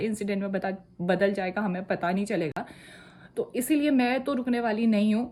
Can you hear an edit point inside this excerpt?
no; 0 cuts

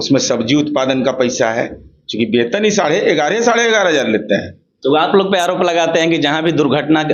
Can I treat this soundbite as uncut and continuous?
yes; 0 cuts

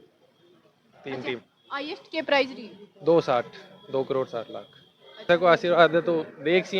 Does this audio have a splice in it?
yes; 1 cut; at 5.3 s

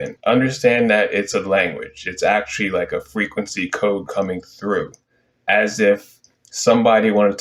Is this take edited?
no; 0 cuts

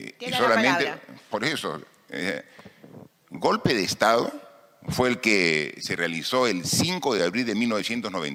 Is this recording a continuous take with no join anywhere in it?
yes; 0 cuts

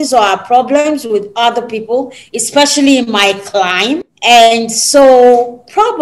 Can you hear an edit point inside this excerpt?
yes; 1 cut; at 4.1 s

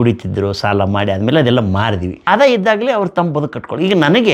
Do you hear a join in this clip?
yes; 1 cut; at 2.2 s

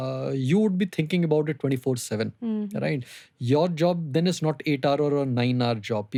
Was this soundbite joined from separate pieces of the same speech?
no; 0 cuts

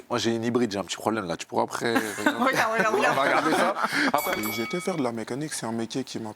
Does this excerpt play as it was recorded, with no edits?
no; 1 cut; at 4.3 s

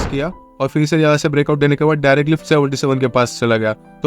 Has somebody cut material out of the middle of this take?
yes; 1 cut; at 2.4 s

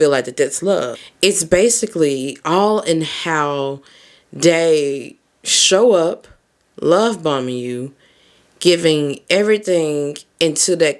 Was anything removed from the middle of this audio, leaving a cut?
yes; 1 cut; at 1.0 s

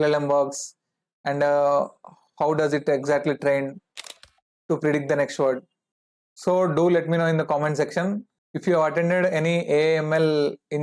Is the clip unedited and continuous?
no; 1 cut; at 5.9 s

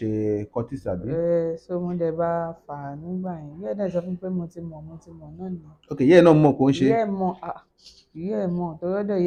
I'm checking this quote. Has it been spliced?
no; 0 cuts

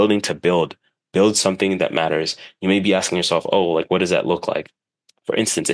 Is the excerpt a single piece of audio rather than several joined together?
yes; 0 cuts

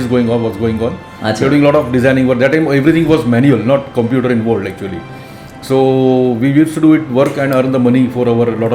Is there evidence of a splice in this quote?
no; 0 cuts

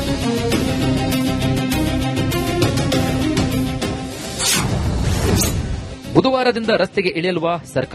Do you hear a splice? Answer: no; 0 cuts

